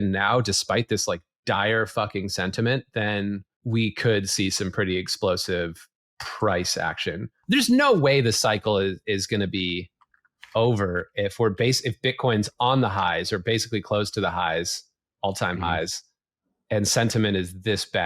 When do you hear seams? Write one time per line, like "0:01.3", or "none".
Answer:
0:03.5
0:07.3